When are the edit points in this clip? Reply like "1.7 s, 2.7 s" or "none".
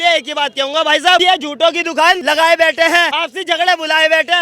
1.2 s, 2.2 s, 3.2 s